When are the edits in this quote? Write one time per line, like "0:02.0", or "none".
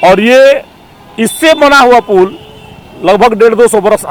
none